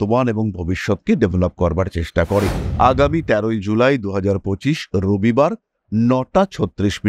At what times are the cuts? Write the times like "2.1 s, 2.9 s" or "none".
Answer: 2.6 s